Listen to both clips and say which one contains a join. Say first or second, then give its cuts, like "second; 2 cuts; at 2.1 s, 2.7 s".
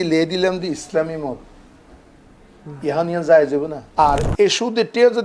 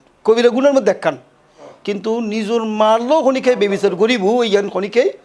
first; 1 cut; at 3.8 s